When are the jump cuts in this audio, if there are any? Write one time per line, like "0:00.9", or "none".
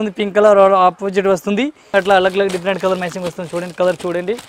0:01.8